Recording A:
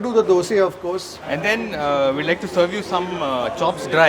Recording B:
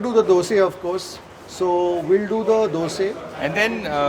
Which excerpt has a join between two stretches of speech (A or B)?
A